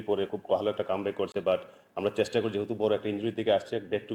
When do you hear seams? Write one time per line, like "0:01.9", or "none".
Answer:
none